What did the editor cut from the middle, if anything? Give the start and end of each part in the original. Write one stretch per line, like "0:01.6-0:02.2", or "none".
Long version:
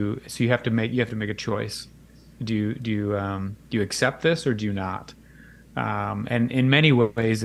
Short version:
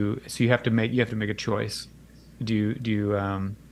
none